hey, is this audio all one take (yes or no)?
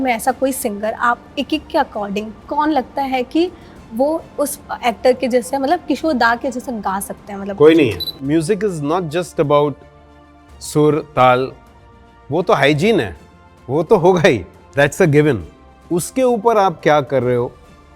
no